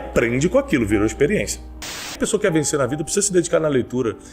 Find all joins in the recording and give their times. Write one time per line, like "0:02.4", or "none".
0:02.2